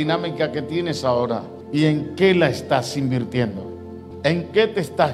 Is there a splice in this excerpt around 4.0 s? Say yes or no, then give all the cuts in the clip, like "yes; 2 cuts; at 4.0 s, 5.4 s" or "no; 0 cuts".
yes; 2 cuts; at 1.5 s, 4.0 s